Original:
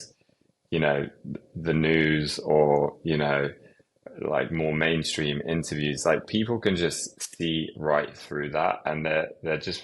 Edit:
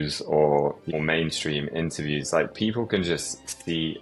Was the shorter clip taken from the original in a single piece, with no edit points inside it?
no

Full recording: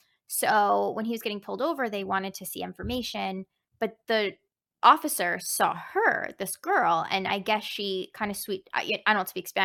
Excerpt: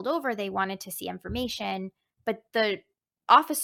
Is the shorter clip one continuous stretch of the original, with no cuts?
yes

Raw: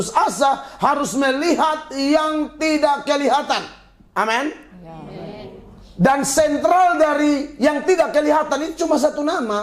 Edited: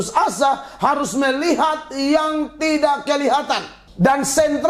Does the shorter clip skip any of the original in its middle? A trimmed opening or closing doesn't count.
yes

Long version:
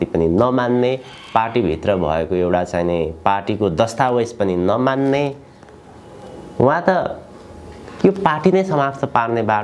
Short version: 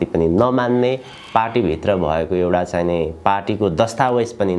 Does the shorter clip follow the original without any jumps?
yes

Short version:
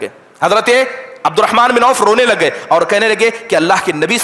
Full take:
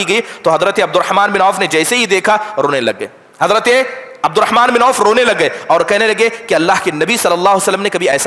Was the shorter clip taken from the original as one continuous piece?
yes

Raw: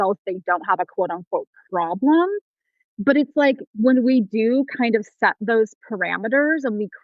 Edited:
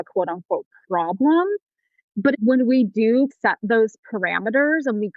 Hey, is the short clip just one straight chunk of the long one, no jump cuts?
no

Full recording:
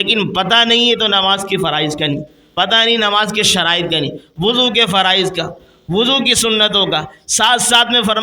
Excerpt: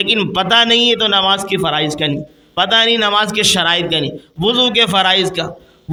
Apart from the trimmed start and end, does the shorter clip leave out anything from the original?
no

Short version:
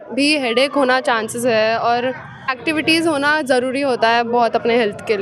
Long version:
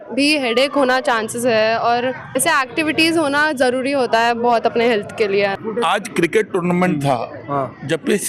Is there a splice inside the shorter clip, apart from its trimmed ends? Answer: yes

